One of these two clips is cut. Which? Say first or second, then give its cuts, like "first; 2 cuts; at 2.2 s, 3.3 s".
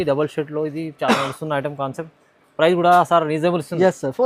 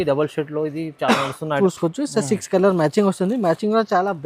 second; 1 cut; at 1.6 s